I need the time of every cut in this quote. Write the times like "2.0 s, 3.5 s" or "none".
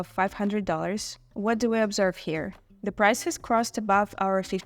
1.2 s